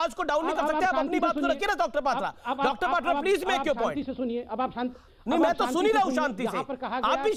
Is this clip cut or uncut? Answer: uncut